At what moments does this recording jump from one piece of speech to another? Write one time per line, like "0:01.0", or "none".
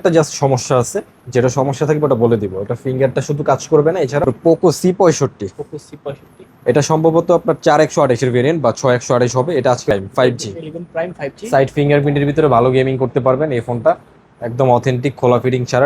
0:04.3
0:09.9